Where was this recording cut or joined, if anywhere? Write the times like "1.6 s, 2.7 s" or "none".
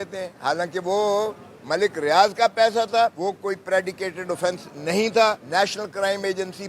3.2 s, 5.4 s